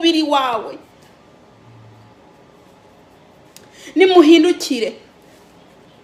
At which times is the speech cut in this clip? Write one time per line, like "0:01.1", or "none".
none